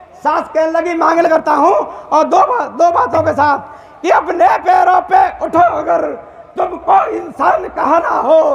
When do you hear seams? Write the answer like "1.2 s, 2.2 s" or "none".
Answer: 1.3 s